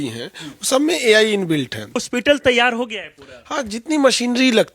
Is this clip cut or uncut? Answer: cut